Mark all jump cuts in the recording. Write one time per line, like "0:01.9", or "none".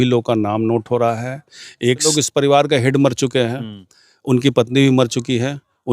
0:02.1